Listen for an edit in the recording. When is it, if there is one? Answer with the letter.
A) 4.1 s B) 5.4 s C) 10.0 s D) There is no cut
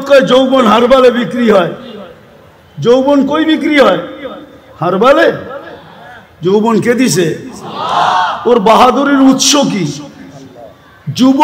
D